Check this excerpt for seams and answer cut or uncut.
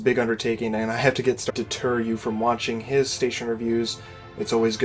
uncut